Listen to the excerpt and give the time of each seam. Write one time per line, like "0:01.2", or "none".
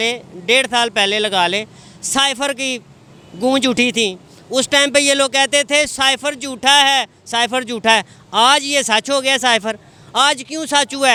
none